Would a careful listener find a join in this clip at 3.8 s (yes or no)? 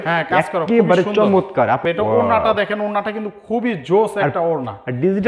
no